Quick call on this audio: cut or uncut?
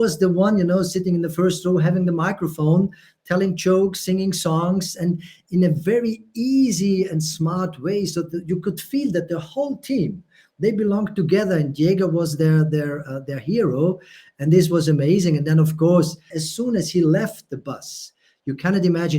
cut